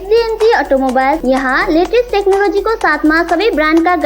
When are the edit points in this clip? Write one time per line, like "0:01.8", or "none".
0:01.2